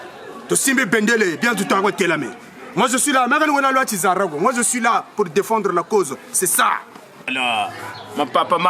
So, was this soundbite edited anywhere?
yes; 1 cut; at 7.3 s

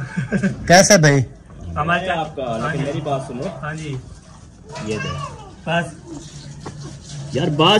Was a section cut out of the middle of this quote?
yes; 1 cut; at 2.1 s

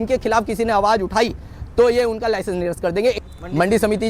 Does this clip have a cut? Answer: yes; 1 cut; at 3.2 s

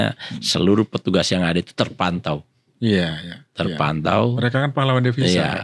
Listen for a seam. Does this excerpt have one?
no; 0 cuts

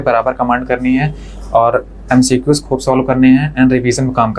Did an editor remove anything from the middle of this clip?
no; 0 cuts

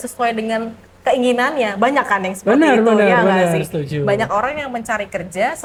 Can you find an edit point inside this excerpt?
no; 0 cuts

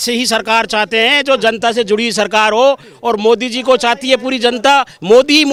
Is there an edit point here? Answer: no; 0 cuts

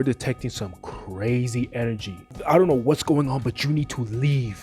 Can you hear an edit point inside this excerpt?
yes; 1 cut; at 2.3 s

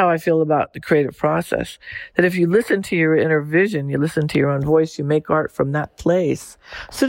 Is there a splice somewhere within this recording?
no; 0 cuts

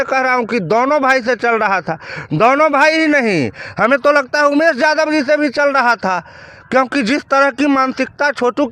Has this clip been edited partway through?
no; 0 cuts

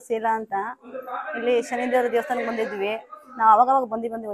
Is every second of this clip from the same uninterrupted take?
yes; 0 cuts

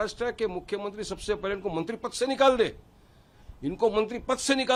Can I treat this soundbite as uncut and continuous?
yes; 0 cuts

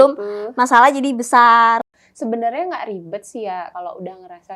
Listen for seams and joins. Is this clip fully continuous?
no; 2 cuts; at 1.9 s, 3.7 s

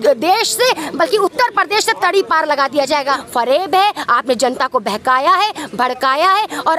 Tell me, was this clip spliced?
yes; 1 cut; at 3.2 s

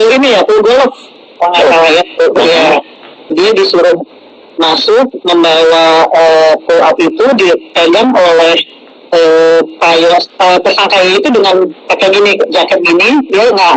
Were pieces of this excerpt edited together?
yes; 1 cut; at 3.3 s

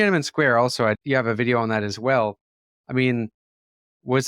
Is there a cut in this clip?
yes; 1 cut; at 1.0 s

